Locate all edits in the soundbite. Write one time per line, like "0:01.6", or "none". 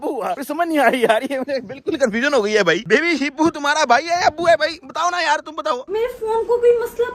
0:02.8
0:05.8